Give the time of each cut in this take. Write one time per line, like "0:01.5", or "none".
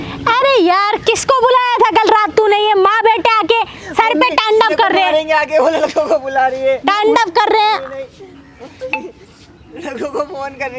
none